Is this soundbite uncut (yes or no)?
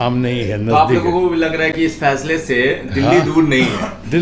yes